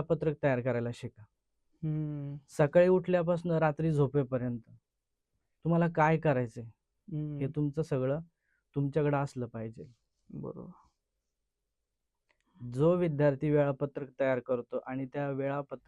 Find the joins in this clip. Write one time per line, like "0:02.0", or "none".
none